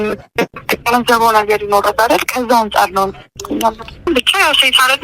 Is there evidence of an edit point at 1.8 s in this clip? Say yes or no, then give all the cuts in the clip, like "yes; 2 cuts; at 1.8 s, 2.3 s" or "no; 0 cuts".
no; 1 cut; at 4.1 s